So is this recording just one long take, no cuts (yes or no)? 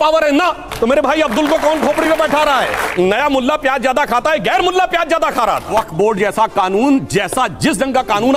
no